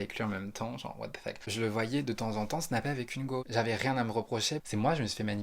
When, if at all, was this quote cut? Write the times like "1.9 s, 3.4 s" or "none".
1.4 s, 3.5 s, 4.6 s